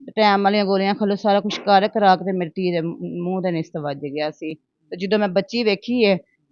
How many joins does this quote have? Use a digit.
0